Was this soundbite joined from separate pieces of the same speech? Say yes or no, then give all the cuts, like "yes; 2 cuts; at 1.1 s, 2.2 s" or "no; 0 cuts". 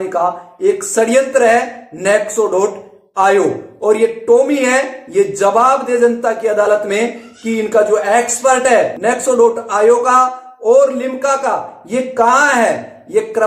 yes; 1 cut; at 9.0 s